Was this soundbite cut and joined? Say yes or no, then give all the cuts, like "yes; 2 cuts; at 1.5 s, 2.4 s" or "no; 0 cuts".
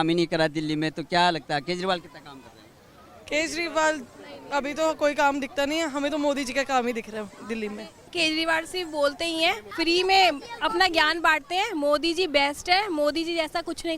yes; 2 cuts; at 8.1 s, 9.7 s